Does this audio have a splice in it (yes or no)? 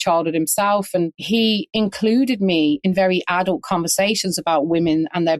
yes